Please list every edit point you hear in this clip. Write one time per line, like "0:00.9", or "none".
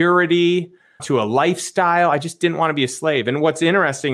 0:01.0